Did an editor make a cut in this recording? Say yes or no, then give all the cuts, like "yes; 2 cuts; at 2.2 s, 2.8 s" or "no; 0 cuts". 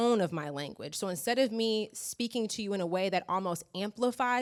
no; 0 cuts